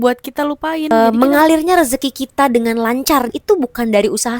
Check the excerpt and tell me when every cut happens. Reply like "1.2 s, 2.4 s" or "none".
0.9 s, 3.3 s